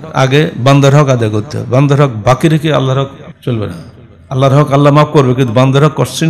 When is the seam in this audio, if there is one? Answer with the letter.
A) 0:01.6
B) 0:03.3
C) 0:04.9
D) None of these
B